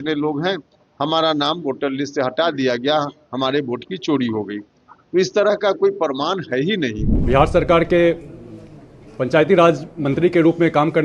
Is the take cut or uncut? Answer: cut